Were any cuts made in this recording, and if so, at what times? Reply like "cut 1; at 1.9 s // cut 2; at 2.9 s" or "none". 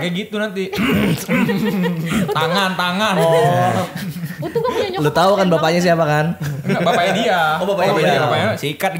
none